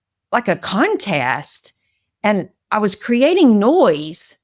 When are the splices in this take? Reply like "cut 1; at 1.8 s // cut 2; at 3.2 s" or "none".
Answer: cut 1; at 2.6 s